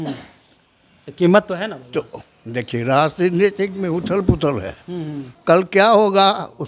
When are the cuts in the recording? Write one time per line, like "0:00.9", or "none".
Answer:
0:05.2

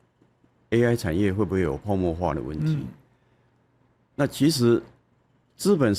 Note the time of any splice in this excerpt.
none

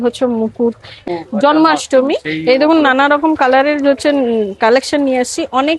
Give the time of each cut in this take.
0:01.0

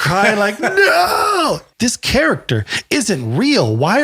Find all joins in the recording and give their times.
0:01.7

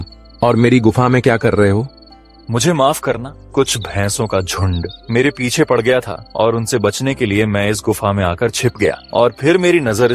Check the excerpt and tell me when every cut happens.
0:03.3
0:05.0
0:06.2
0:09.0

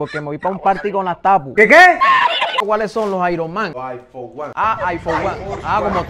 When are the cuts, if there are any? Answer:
0:02.6

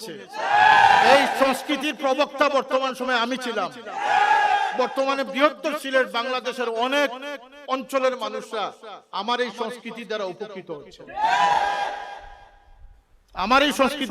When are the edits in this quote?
none

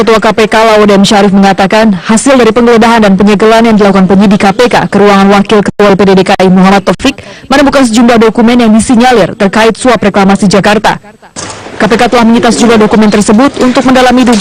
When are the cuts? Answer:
0:04.8

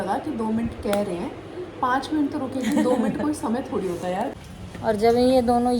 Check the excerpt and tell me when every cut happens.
0:04.3

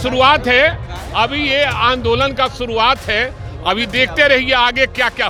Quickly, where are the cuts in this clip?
none

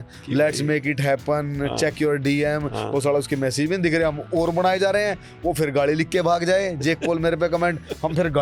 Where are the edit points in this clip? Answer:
none

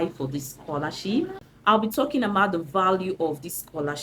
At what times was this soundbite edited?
0:01.5

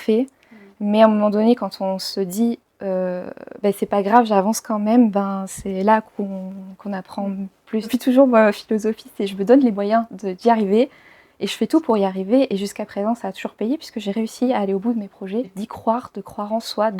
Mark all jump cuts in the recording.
0:07.9
0:15.6

